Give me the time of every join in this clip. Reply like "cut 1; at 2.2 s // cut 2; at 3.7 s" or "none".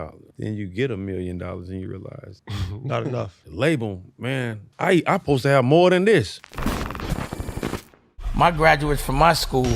cut 1; at 6.4 s

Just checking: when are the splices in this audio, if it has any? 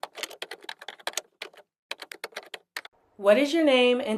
cut 1; at 2.1 s

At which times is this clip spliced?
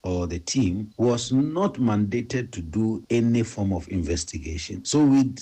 none

